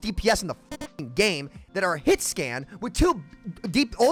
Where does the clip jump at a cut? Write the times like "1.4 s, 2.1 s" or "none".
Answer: none